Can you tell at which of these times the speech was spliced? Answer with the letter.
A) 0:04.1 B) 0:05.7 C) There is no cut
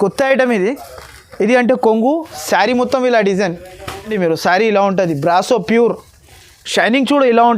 A